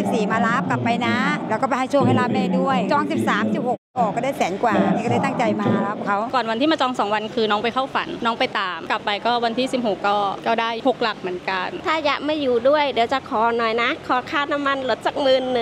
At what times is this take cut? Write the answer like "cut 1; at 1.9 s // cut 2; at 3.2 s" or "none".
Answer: cut 1; at 6.3 s // cut 2; at 8.9 s // cut 3; at 11.8 s